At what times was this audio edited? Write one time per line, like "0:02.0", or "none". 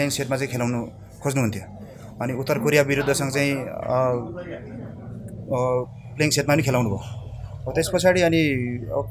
none

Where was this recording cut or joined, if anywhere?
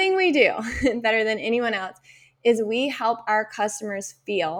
none

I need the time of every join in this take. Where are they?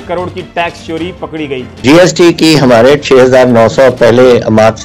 0:01.7

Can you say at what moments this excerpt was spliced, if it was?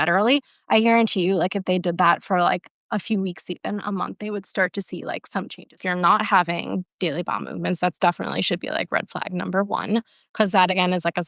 0:05.8

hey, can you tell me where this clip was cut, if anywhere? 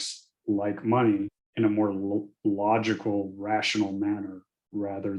0:01.4

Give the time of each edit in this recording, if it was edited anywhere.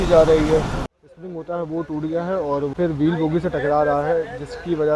0:00.9
0:02.7

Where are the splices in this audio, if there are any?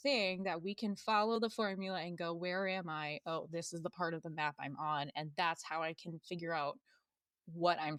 none

